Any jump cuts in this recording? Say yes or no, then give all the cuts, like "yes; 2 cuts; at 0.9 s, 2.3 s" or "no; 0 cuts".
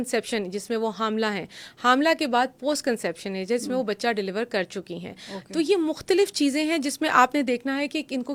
no; 0 cuts